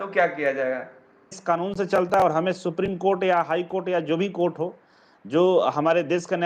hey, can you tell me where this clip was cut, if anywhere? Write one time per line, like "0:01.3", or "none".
0:01.4